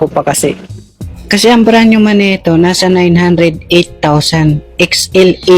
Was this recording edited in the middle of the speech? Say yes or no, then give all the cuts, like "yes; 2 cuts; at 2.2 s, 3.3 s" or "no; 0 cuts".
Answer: no; 0 cuts